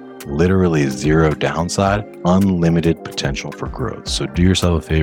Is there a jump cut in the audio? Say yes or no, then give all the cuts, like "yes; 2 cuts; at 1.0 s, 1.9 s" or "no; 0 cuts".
yes; 1 cut; at 2.1 s